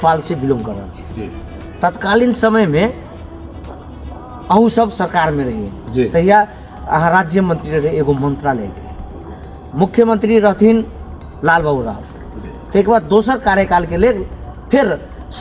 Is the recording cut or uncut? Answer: uncut